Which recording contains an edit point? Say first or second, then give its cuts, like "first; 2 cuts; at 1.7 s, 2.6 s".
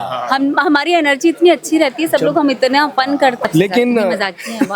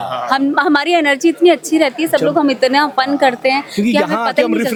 first; 1 cut; at 3.4 s